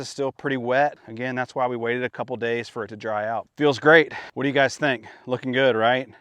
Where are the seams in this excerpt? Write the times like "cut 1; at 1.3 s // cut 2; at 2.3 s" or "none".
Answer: cut 1; at 1.1 s // cut 2; at 3.5 s // cut 3; at 4.2 s